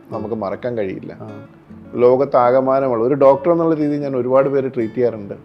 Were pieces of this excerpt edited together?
no; 0 cuts

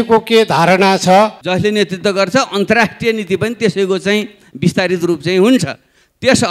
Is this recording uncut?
no; 1 cut; at 1.4 s

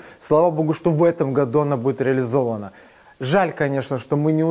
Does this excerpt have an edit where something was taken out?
no; 0 cuts

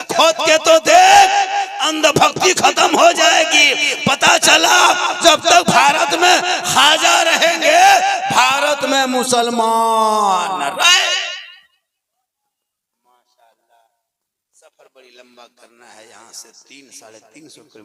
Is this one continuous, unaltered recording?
yes; 0 cuts

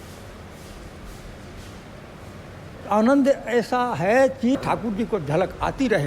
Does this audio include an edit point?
yes; 1 cut; at 4.6 s

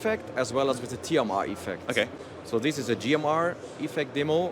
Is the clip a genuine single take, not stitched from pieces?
yes; 0 cuts

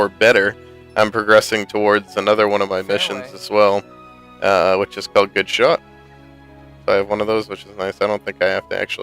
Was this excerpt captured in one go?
no; 1 cut; at 7.9 s

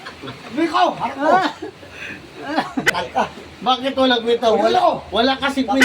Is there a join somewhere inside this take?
yes; 1 cut; at 2.9 s

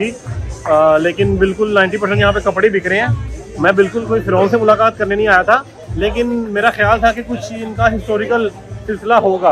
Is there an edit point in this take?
no; 0 cuts

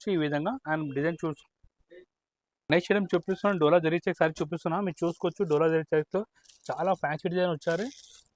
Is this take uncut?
no; 1 cut; at 1.4 s

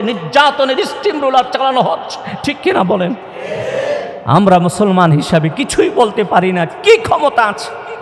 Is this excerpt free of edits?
yes; 0 cuts

